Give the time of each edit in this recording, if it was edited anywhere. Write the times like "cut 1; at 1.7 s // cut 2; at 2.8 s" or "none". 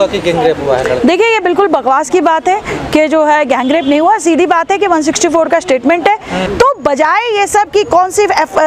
cut 1; at 6.4 s